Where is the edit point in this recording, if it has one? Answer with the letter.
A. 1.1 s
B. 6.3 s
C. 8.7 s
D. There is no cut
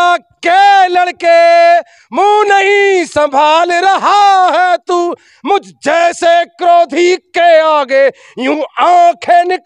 D